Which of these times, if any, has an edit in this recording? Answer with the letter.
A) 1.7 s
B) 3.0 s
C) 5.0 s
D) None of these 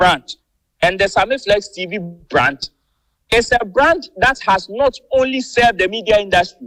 D